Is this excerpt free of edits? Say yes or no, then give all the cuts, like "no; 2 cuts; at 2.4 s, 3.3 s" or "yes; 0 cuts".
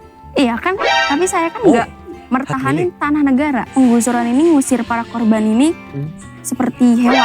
no; 1 cut; at 3.7 s